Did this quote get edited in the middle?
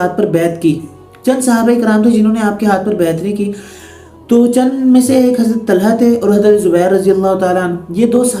no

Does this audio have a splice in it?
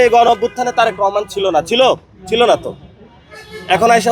no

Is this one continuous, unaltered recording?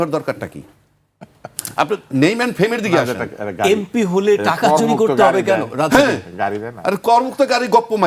yes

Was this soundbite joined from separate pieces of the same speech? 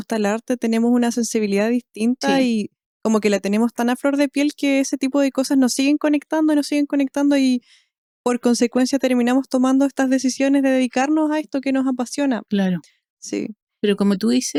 no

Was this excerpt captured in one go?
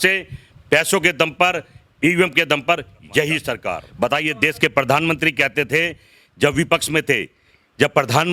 no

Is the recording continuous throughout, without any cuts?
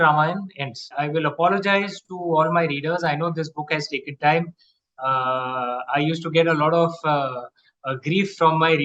no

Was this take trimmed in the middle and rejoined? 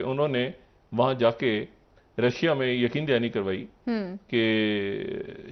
no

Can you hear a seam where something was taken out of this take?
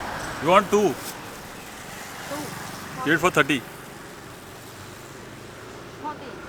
no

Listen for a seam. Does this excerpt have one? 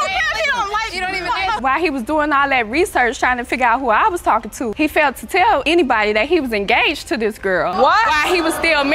yes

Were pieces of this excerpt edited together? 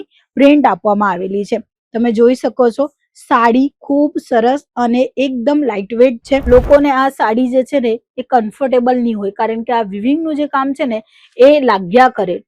yes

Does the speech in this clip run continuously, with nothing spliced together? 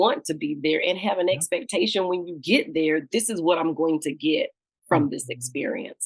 yes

